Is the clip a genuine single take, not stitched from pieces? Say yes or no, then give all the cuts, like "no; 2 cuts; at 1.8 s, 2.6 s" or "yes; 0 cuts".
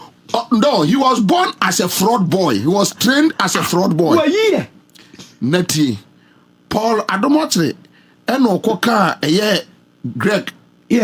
yes; 0 cuts